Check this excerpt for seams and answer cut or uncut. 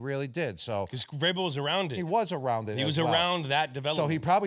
cut